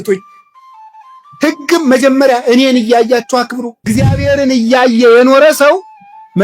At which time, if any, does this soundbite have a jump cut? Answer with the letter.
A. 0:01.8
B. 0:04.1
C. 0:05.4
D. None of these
B